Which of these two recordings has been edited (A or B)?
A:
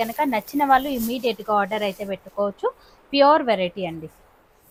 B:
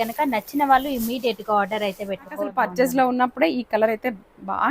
B